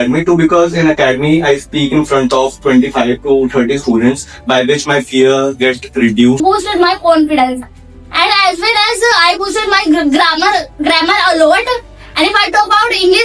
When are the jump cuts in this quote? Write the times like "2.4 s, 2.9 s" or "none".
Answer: 6.4 s

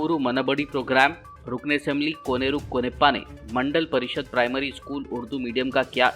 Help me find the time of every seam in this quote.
none

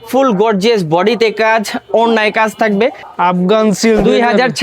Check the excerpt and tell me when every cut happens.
3.0 s

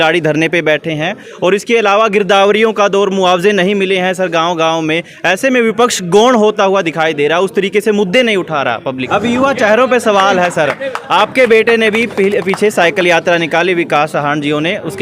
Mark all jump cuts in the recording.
9.0 s

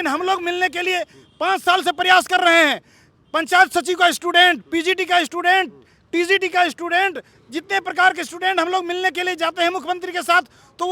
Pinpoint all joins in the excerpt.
7.3 s

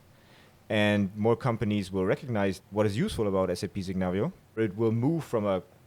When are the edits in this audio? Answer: 2.6 s, 4.6 s

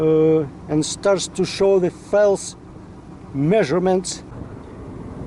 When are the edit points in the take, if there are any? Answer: 4.3 s

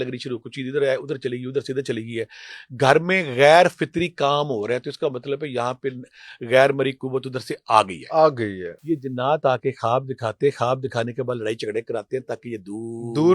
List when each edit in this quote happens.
8.7 s

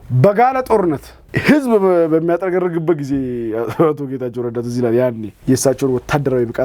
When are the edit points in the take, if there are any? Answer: none

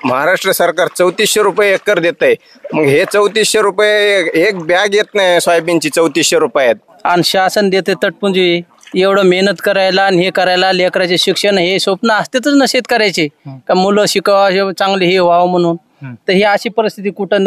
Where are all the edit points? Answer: 6.9 s

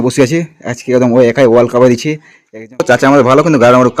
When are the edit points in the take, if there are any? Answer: 2.8 s

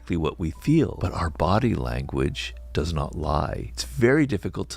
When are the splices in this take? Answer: 1.0 s, 3.7 s

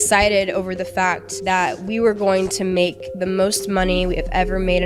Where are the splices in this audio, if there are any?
1.3 s

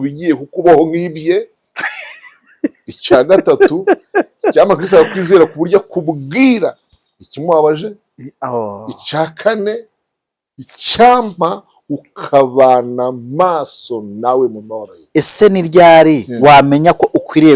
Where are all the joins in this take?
15.1 s

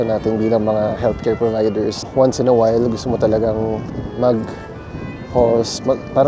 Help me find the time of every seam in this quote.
2.1 s, 3.9 s

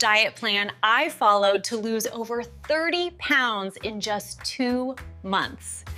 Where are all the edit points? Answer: none

